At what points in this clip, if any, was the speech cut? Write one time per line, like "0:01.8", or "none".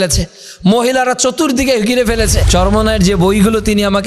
0:02.4